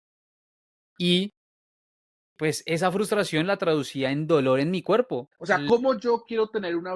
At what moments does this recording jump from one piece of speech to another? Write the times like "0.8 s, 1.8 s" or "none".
5.4 s